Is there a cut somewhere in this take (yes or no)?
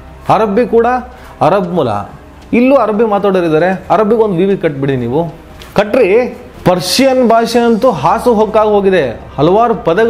no